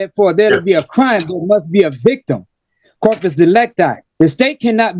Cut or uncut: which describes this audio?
uncut